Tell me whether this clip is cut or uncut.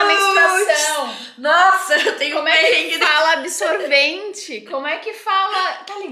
uncut